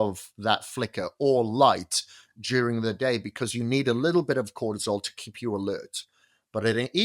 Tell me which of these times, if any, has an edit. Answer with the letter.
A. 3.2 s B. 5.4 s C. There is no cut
C